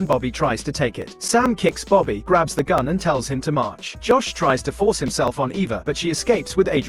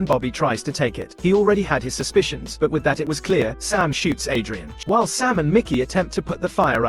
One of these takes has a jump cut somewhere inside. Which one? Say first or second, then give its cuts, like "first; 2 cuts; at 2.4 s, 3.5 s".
second; 2 cuts; at 1.1 s, 4.7 s